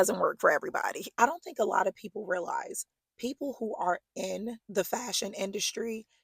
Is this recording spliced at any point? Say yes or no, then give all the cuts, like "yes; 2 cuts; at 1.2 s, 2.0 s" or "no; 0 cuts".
yes; 2 cuts; at 1.0 s, 4.6 s